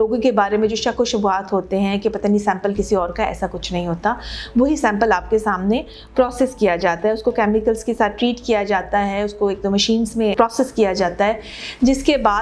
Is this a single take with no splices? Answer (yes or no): yes